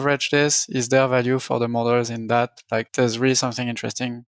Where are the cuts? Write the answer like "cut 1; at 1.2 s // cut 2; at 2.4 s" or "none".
none